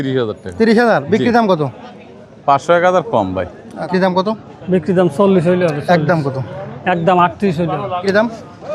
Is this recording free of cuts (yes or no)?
no